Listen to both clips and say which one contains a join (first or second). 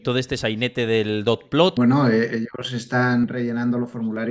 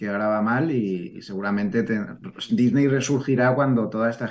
first